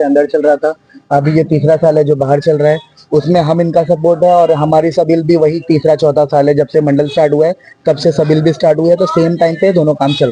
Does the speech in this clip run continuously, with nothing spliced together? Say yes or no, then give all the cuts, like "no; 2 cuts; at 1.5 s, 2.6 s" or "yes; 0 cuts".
yes; 0 cuts